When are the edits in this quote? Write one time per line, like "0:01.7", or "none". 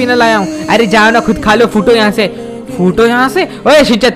none